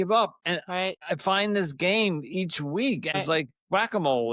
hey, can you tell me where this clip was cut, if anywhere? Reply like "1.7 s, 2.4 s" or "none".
0.9 s, 3.2 s